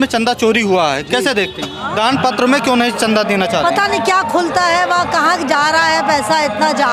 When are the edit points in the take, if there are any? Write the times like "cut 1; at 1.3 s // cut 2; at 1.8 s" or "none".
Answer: cut 1; at 1.9 s